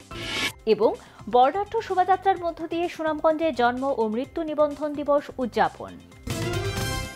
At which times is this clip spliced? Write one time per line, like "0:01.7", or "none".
0:06.2